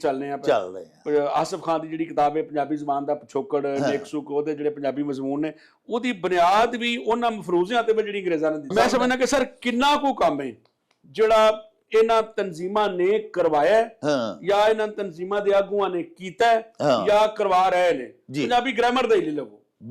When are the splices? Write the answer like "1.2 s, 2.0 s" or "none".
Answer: 8.7 s